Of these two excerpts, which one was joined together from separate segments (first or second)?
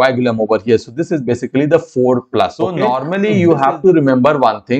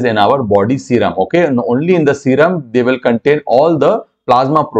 first